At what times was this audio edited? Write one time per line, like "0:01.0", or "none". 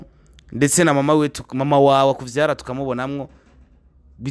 none